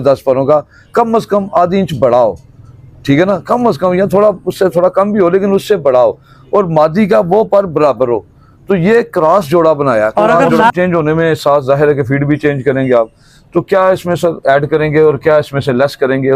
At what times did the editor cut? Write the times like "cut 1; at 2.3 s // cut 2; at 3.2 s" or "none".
cut 1; at 10.7 s